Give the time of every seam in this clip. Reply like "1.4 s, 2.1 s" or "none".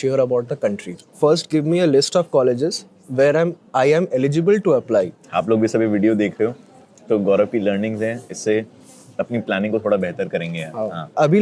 1.0 s, 5.2 s